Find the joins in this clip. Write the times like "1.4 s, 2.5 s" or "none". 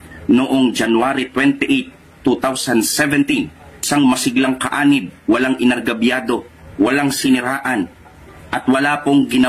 none